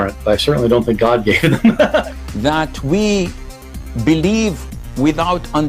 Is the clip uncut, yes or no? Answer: no